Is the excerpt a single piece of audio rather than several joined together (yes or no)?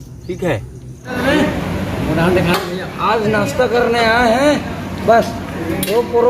no